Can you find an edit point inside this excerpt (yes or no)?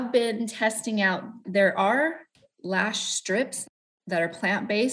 yes